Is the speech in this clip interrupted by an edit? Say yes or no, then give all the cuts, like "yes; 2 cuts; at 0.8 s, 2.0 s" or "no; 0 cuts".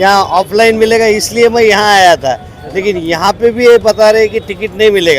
no; 0 cuts